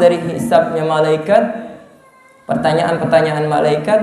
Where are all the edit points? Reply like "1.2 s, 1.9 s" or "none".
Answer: none